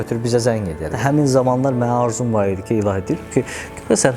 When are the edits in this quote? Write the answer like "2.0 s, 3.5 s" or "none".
0.9 s